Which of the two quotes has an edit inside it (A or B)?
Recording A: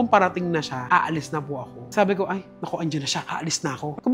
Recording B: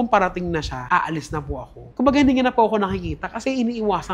B